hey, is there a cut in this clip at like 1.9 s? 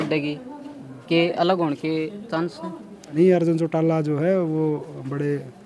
no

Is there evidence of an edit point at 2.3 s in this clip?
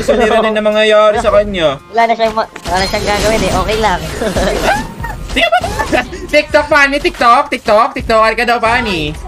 yes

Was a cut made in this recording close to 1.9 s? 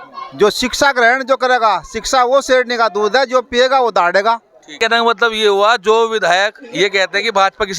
no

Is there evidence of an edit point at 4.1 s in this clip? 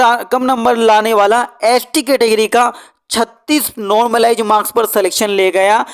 no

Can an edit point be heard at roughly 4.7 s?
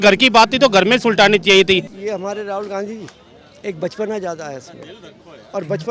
no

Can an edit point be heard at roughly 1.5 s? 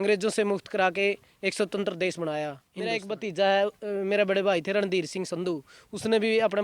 no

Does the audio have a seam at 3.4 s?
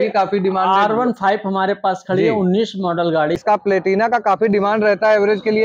yes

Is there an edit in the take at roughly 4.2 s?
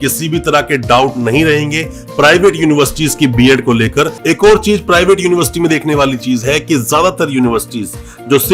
yes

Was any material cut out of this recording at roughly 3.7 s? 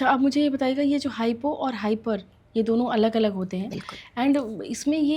no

